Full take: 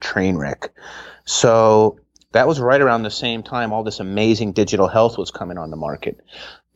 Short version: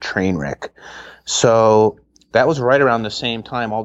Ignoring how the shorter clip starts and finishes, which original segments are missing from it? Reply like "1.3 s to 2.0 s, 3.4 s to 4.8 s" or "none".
none